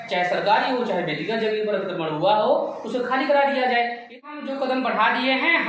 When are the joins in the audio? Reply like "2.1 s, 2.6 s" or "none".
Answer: 4.2 s